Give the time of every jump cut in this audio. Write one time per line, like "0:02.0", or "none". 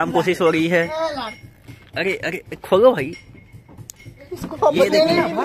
none